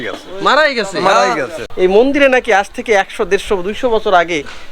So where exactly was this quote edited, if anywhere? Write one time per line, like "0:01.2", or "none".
0:01.6